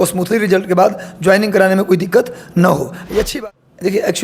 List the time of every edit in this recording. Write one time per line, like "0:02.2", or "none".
0:03.3